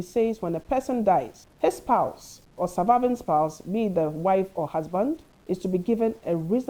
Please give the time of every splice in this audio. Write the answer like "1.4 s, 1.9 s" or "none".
1.4 s, 5.3 s

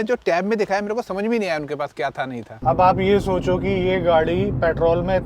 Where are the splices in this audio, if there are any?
2.5 s

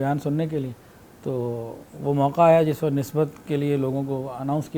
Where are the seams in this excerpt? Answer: none

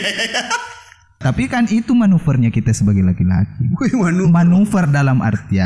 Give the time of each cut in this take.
1.2 s

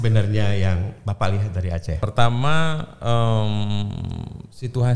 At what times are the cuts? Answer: 2.0 s

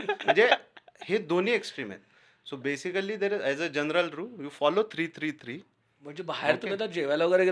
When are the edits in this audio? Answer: none

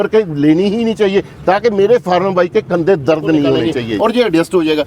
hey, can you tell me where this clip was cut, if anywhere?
3.7 s

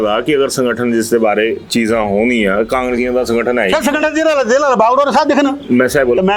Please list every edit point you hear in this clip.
none

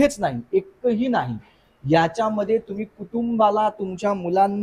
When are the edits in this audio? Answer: none

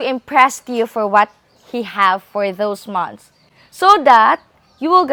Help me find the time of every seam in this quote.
none

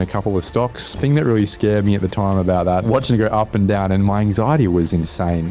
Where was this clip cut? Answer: 1.0 s, 2.8 s

